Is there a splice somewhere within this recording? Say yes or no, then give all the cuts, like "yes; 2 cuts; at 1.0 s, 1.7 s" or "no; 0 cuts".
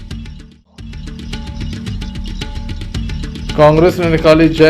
yes; 2 cuts; at 1.3 s, 3.1 s